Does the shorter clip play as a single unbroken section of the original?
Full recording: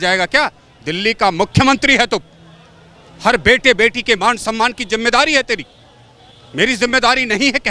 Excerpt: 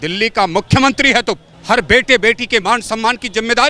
no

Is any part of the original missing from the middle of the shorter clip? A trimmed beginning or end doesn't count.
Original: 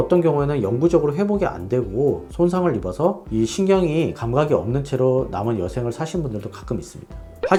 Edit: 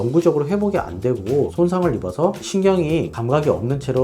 yes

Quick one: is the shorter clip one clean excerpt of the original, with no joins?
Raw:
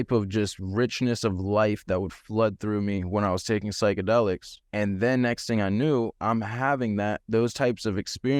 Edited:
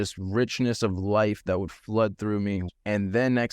no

